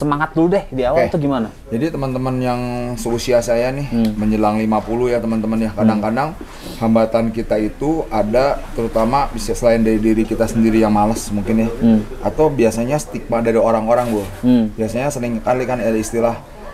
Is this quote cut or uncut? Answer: uncut